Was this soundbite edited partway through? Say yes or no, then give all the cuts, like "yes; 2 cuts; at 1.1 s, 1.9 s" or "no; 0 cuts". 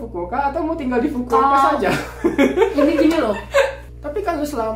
yes; 1 cut; at 3.8 s